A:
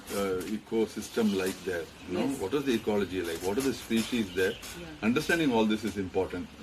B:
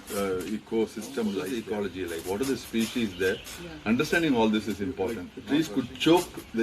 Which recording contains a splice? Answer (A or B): B